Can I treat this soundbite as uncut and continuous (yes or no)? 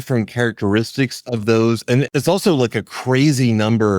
no